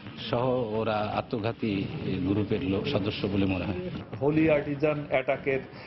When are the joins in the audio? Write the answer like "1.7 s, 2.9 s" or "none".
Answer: 3.9 s

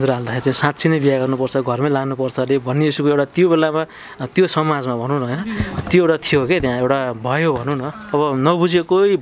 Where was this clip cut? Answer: none

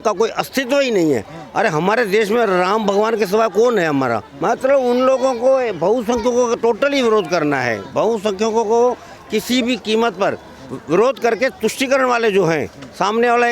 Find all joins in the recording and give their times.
4.3 s

